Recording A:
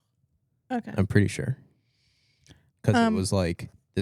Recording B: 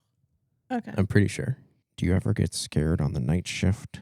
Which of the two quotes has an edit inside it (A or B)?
B